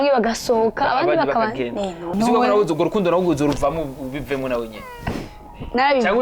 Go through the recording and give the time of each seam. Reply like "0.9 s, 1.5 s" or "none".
2.1 s